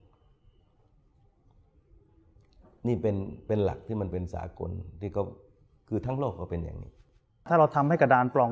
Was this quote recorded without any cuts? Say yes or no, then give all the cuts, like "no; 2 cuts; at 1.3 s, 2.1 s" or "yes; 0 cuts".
no; 1 cut; at 7.5 s